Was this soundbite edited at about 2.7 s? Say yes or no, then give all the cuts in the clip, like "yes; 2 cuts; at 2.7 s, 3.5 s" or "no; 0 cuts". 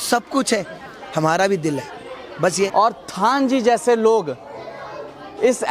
yes; 1 cut; at 2.7 s